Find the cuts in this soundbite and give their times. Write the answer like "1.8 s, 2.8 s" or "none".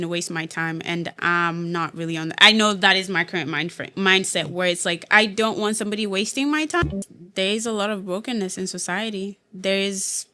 6.9 s

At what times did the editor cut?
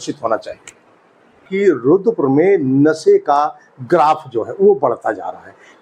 1.5 s

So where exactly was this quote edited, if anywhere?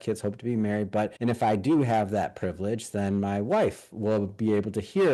1.1 s

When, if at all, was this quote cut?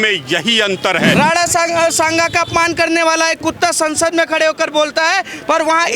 1.1 s

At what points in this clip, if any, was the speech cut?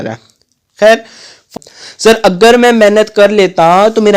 1.5 s

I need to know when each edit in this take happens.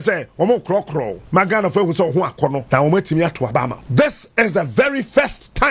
1.2 s, 2.6 s, 3.8 s

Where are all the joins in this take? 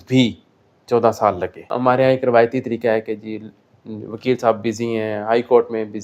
1.7 s

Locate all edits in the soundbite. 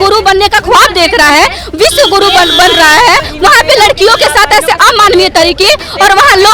none

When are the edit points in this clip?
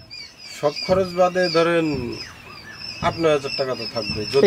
none

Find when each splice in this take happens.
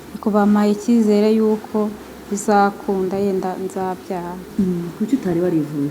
none

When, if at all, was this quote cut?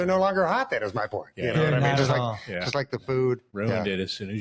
3.5 s

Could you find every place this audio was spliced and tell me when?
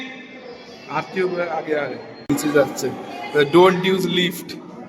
2.3 s

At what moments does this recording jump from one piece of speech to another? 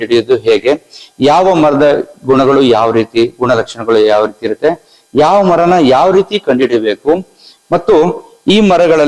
none

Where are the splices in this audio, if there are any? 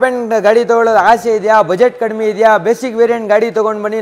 none

